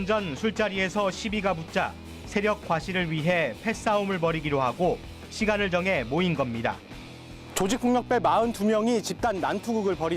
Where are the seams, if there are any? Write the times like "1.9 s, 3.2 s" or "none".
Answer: 5.1 s